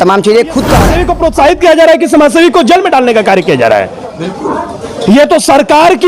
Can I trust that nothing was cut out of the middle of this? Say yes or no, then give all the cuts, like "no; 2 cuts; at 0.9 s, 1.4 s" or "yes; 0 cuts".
no; 1 cut; at 1.0 s